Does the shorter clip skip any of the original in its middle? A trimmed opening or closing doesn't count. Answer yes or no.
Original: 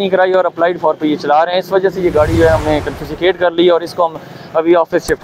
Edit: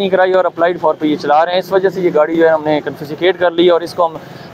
no